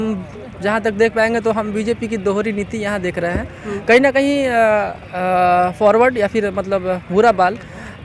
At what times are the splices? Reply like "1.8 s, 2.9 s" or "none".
none